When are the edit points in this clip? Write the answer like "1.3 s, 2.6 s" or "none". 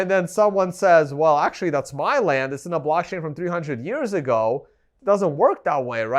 4.8 s